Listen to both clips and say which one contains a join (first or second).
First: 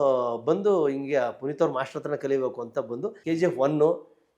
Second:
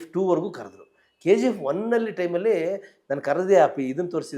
first